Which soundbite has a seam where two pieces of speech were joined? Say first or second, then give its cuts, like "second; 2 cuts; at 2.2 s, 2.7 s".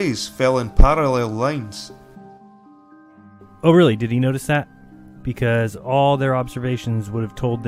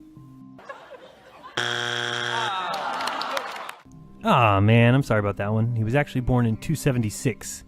second; 1 cut; at 3.0 s